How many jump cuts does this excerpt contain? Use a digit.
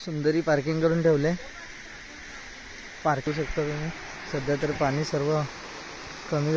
1